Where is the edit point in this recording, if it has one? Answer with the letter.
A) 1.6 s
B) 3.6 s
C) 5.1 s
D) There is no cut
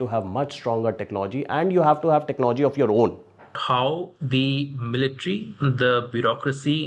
B